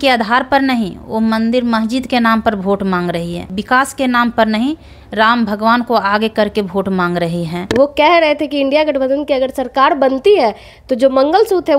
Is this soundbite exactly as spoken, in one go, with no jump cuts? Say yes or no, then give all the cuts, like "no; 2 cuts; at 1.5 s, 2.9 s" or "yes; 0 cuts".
no; 2 cuts; at 3.5 s, 7.7 s